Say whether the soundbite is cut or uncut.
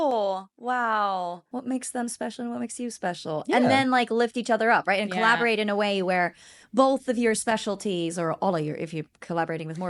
cut